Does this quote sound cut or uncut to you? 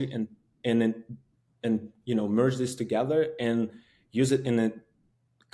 uncut